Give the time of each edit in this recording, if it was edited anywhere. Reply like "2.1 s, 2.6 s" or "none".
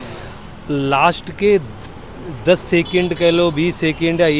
none